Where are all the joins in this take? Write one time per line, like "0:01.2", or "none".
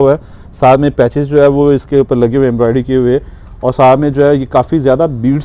none